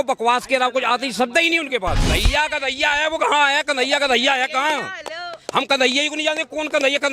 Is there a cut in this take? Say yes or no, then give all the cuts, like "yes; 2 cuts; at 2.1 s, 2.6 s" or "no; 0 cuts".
yes; 1 cut; at 2.1 s